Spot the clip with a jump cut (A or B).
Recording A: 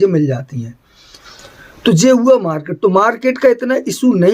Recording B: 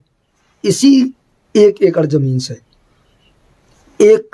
A